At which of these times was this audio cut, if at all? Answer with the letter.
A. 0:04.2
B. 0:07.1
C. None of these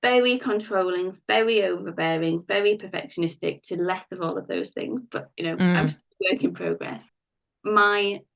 B